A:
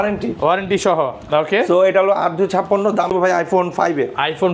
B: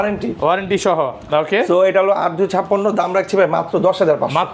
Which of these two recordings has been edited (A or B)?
A